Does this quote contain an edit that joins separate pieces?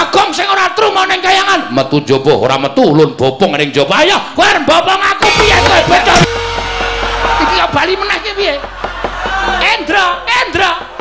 yes; 1 cut; at 6.3 s

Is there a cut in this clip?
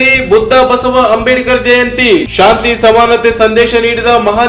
no; 0 cuts

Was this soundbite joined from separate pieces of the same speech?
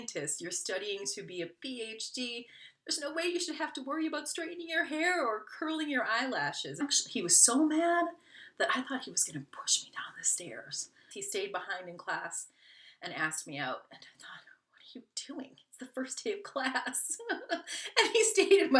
yes; 2 cuts; at 6.8 s, 11.1 s

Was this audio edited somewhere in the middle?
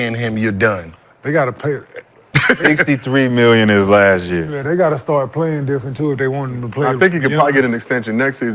no; 0 cuts

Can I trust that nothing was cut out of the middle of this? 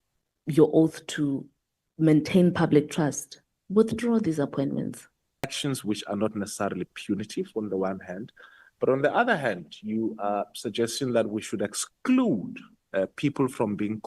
no; 1 cut; at 5.4 s

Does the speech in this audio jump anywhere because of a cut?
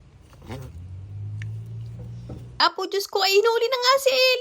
yes; 1 cut; at 2.6 s

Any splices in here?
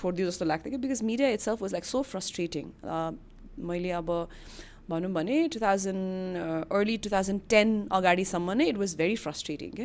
no; 0 cuts

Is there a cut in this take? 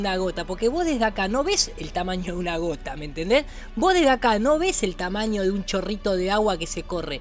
no; 0 cuts

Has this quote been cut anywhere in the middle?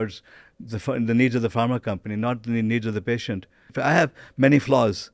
yes; 1 cut; at 3.8 s

